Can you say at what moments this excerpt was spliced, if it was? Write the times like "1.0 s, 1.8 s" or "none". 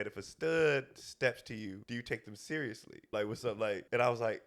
1.8 s, 3.4 s